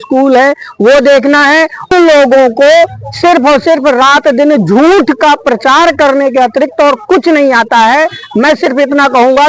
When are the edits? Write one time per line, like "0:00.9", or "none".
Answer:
0:01.9